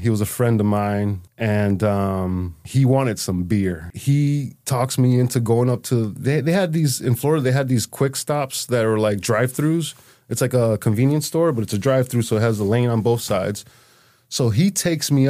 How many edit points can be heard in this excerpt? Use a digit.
4